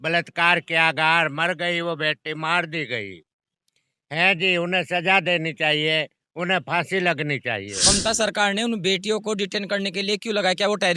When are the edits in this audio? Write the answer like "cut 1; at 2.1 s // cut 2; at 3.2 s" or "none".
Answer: cut 1; at 7.7 s